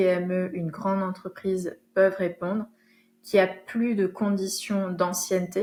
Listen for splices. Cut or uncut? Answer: uncut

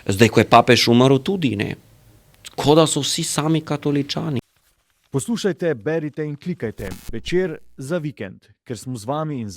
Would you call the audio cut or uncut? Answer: cut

